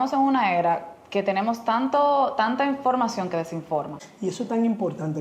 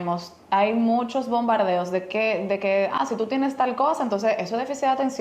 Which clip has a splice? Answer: first; 1 cut; at 4.0 s

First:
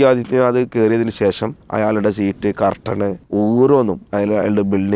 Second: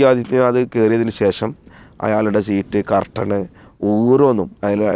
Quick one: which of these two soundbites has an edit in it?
first; 2 cuts; at 1.6 s, 3.2 s

